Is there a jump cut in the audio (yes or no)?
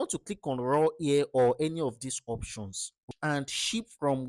yes